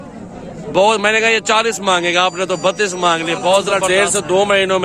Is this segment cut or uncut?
cut